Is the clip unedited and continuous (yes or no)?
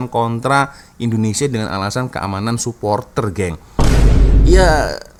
yes